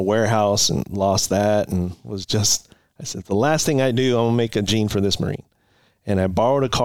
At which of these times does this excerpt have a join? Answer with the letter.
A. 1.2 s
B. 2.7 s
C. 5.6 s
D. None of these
D